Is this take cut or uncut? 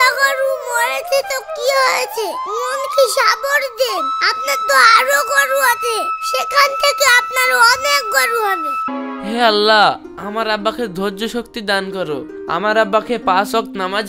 cut